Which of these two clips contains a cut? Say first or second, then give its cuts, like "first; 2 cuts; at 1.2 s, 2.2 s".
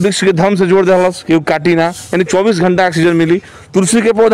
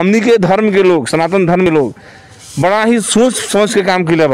second; 1 cut; at 1.7 s